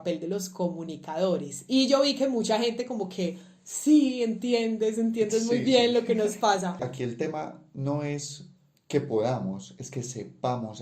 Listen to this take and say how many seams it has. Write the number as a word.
one